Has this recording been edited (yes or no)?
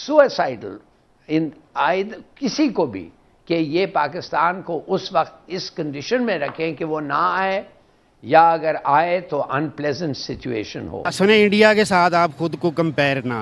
yes